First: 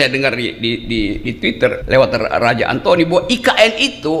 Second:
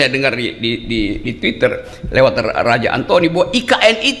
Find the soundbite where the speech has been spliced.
first; 1 cut; at 1.8 s

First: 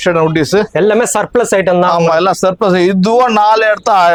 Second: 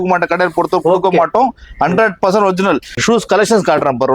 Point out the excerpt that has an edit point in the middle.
second; 1 cut; at 3.0 s

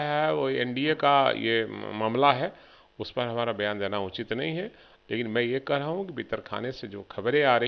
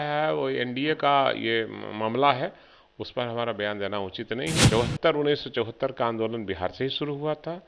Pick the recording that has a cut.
second; 1 cut; at 4.6 s

